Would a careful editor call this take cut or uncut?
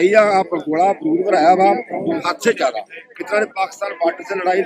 uncut